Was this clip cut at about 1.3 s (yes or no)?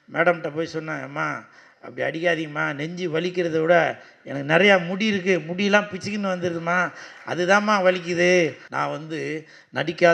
no